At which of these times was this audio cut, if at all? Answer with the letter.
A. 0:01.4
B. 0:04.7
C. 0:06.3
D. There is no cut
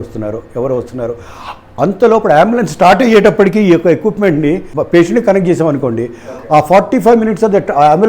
B